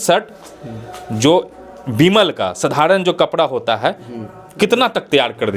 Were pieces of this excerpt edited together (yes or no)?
no